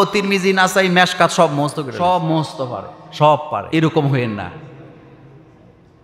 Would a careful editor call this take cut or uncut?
cut